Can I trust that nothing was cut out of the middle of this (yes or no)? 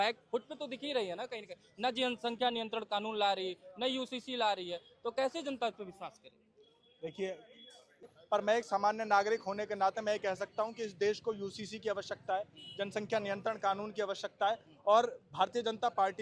no